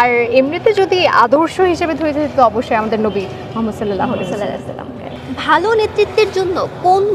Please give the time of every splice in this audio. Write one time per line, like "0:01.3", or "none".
0:05.1